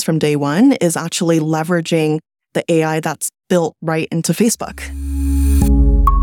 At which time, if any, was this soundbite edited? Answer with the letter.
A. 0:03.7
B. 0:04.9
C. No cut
B